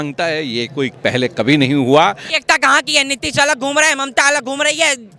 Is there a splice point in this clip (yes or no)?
yes